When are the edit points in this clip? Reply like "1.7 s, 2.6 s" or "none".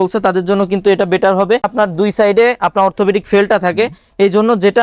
1.6 s